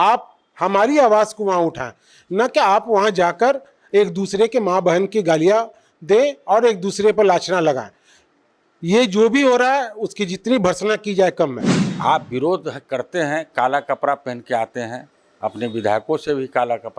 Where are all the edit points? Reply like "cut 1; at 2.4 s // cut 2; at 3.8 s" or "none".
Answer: cut 1; at 11.7 s